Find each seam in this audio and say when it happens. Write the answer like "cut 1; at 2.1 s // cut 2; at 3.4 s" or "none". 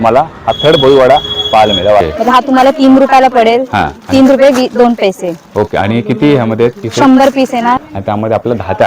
cut 1; at 2.0 s // cut 2; at 7.8 s

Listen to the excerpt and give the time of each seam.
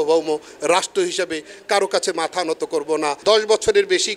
cut 1; at 3.2 s

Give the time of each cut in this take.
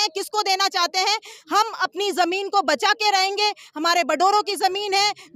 none

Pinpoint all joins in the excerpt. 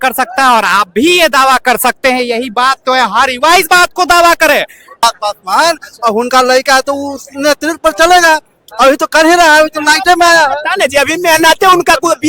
cut 1; at 5.0 s

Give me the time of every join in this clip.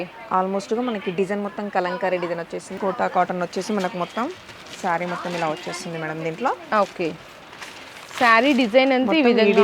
cut 1; at 2.8 s

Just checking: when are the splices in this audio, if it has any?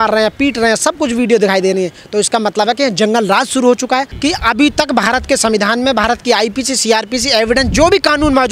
cut 1; at 4.1 s

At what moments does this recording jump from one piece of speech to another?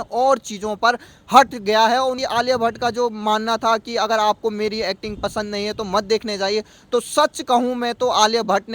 cut 1; at 2.2 s

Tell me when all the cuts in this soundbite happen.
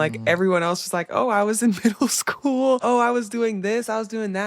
cut 1; at 2.8 s

